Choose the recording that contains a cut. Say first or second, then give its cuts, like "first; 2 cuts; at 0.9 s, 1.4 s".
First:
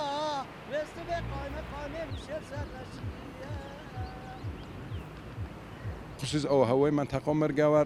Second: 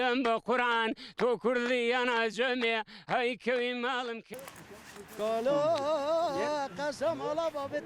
second; 1 cut; at 4.3 s